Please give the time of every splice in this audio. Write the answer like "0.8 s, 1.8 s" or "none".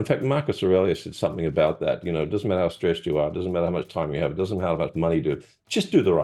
none